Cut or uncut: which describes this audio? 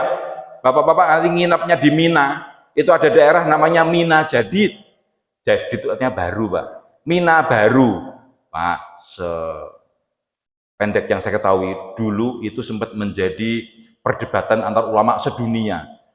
uncut